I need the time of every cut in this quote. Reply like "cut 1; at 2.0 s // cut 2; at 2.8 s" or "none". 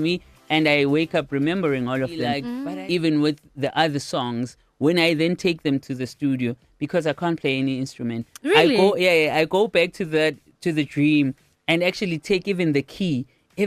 cut 1; at 2.5 s